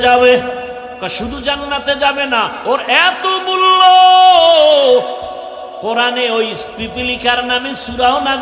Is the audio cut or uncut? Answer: cut